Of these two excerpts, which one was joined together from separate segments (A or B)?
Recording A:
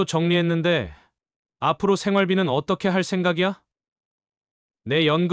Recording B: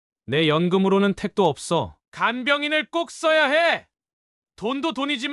B